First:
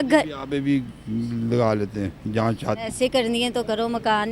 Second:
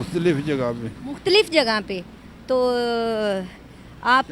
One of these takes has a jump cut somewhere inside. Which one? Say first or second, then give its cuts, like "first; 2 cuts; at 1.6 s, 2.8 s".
first; 1 cut; at 2.8 s